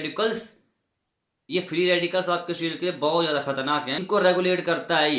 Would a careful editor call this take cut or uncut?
cut